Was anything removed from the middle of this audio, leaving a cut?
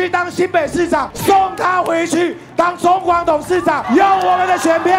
yes; 2 cuts; at 1.1 s, 3.8 s

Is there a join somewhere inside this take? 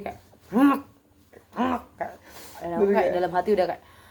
no; 0 cuts

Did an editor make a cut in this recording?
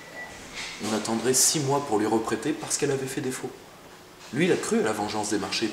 no; 0 cuts

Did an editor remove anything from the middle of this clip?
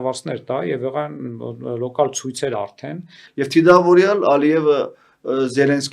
yes; 1 cut; at 3.2 s

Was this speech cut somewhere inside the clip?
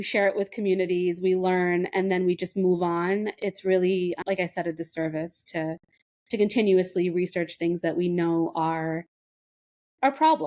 yes; 2 cuts; at 3.3 s, 4.2 s

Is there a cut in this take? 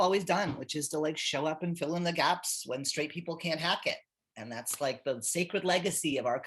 no; 0 cuts

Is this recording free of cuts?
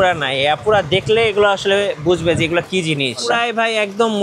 no; 1 cut; at 3.3 s

